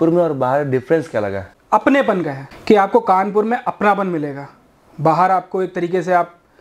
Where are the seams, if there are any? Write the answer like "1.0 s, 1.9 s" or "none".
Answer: 1.5 s, 2.4 s